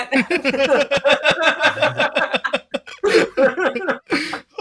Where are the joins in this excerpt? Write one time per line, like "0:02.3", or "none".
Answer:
none